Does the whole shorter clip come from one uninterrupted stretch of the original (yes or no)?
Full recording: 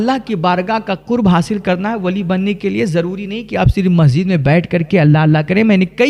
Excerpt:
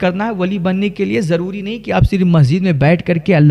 yes